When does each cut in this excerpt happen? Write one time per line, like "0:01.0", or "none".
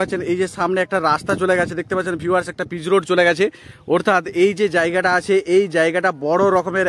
none